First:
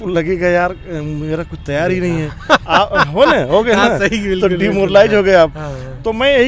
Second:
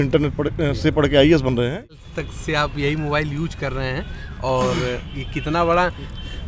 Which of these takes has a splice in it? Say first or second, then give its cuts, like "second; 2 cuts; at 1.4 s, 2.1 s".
second; 1 cut; at 2.0 s